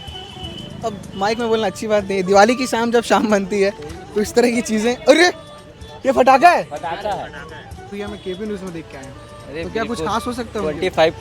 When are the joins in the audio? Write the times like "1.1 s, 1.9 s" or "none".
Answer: 7.9 s

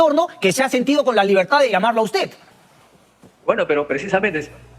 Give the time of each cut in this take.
none

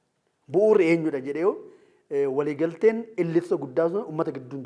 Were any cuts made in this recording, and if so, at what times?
none

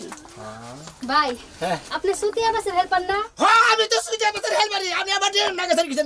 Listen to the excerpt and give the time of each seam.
0.9 s

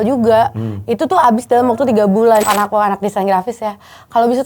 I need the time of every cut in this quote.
2.4 s

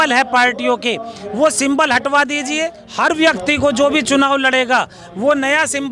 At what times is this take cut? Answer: 2.8 s

